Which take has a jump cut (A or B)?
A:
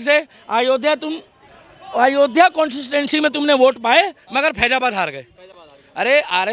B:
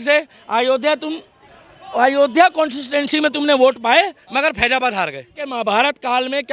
B